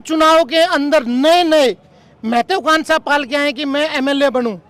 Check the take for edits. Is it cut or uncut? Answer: uncut